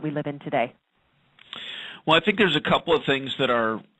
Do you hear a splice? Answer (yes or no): yes